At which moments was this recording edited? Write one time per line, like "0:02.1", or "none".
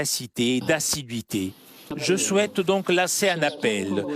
0:01.8